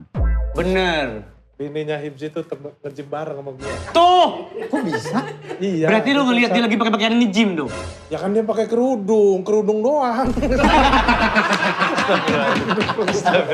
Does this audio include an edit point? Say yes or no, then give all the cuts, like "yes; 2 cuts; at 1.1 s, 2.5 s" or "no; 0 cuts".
no; 0 cuts